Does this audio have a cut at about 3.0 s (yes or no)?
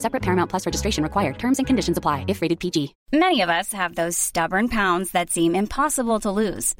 no